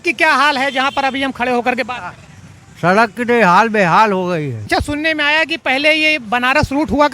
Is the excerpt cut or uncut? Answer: cut